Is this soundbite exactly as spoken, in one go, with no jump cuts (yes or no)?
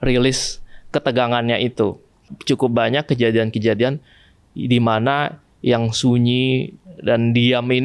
no